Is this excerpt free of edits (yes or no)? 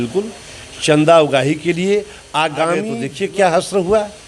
no